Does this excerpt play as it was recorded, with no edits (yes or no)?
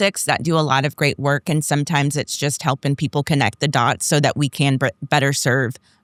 yes